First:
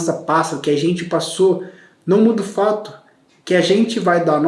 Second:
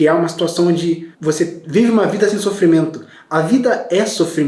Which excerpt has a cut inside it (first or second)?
second